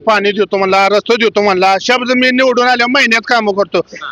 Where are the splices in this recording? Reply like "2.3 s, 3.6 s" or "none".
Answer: none